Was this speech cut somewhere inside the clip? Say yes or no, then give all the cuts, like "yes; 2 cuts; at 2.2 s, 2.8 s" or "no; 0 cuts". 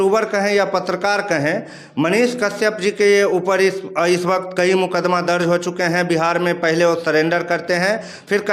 no; 0 cuts